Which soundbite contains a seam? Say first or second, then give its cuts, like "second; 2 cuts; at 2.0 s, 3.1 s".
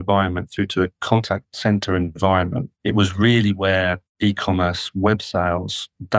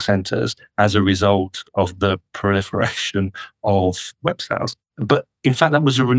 first; 3 cuts; at 1.2 s, 2.7 s, 4.1 s